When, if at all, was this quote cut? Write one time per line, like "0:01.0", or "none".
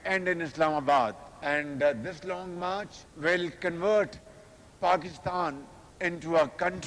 none